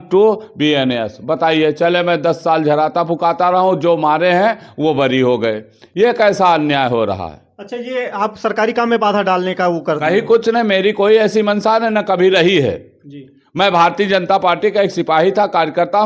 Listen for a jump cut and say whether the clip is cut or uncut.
uncut